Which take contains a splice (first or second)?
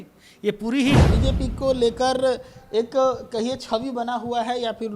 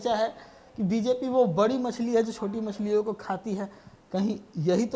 first